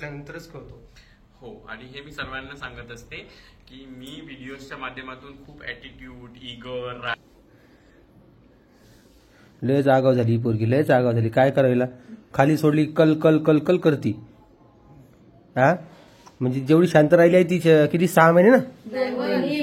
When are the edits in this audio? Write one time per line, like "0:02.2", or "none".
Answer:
0:07.2